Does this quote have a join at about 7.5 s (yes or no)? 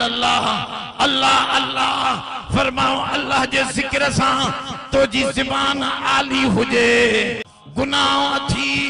yes